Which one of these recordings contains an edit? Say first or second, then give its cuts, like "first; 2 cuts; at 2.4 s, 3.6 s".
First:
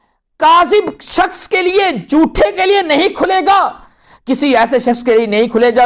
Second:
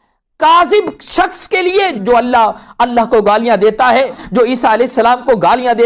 second; 2 cuts; at 2.0 s, 4.2 s